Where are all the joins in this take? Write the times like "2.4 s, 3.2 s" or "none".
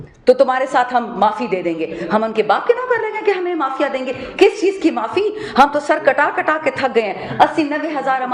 2.6 s